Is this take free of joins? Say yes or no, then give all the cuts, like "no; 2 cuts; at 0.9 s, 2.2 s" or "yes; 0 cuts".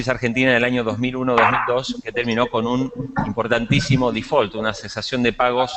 no; 1 cut; at 4.2 s